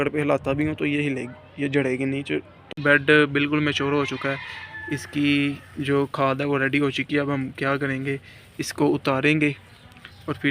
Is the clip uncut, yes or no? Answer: no